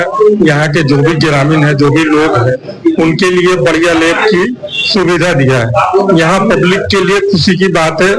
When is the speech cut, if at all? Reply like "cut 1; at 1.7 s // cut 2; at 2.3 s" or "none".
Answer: none